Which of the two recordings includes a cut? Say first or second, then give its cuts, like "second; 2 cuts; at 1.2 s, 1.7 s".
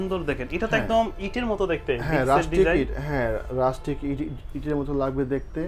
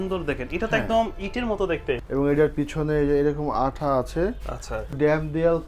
second; 2 cuts; at 2.0 s, 4.9 s